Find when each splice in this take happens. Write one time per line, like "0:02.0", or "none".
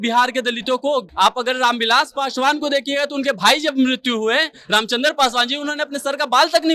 0:01.1